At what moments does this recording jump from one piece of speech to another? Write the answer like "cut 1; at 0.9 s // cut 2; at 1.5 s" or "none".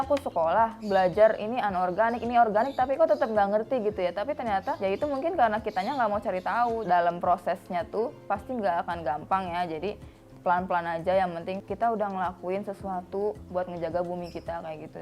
cut 1; at 4.8 s // cut 2; at 6.8 s // cut 3; at 11.6 s

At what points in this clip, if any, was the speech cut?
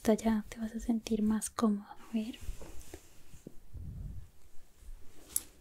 cut 1; at 1.9 s

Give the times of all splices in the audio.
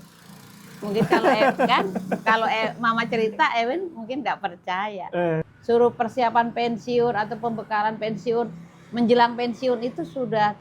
cut 1; at 5.5 s

